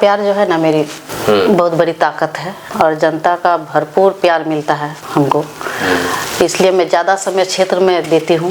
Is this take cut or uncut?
uncut